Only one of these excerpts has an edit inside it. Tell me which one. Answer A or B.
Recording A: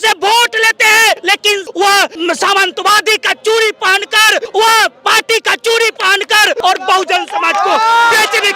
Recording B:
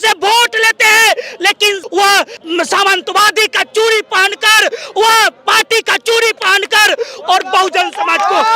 A